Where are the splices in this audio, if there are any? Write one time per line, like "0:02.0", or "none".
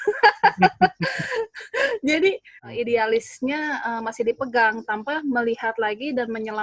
0:02.5